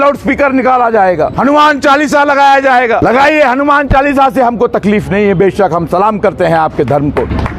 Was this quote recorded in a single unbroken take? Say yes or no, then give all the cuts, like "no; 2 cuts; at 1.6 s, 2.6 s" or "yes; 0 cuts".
no; 2 cuts; at 1.3 s, 3.0 s